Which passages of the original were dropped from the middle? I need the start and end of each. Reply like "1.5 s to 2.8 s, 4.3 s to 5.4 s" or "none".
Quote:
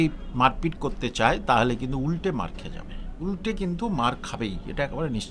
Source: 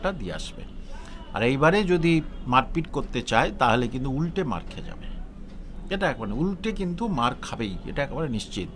5.4 s to 6.4 s